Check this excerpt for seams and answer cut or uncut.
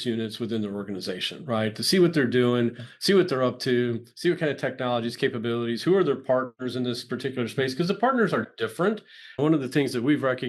uncut